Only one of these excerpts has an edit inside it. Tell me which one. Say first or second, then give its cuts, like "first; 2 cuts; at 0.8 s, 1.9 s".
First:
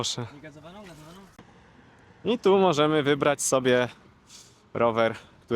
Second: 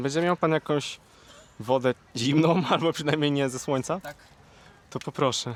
first; 1 cut; at 1.3 s